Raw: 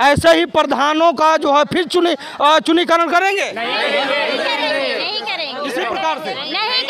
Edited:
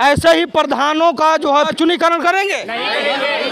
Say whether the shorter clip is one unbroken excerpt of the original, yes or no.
no